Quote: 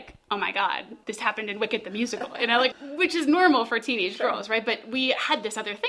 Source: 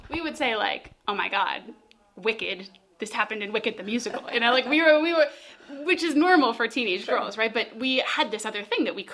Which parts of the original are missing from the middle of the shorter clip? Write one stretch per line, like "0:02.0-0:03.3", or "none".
0:01.7-0:02.9
0:04.7-0:05.6